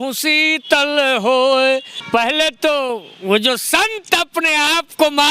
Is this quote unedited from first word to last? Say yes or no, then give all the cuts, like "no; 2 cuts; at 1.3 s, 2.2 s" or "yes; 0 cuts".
no; 1 cut; at 1.9 s